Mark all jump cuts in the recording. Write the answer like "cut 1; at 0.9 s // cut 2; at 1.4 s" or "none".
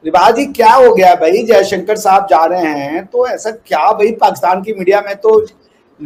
none